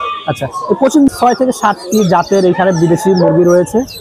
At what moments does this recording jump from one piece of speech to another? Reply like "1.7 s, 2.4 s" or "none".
1.1 s